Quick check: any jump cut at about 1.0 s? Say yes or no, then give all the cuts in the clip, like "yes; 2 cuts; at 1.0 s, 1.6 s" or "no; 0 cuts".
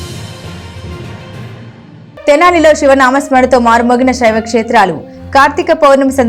no; 1 cut; at 2.3 s